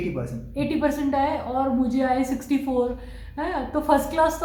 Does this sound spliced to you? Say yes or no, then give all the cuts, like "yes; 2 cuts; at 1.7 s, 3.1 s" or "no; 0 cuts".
no; 0 cuts